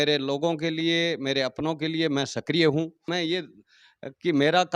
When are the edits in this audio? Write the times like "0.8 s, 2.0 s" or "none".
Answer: 3.1 s